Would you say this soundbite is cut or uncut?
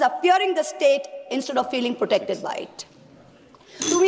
uncut